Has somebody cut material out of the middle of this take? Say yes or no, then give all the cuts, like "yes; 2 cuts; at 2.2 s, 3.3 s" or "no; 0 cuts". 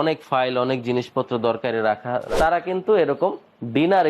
yes; 1 cut; at 2.3 s